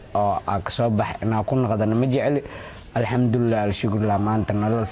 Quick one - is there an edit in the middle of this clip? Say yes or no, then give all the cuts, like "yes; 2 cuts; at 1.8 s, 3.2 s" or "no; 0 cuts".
no; 0 cuts